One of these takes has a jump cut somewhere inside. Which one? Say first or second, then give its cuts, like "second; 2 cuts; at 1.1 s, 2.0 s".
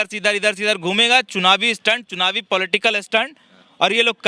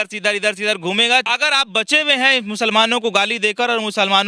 second; 1 cut; at 1.2 s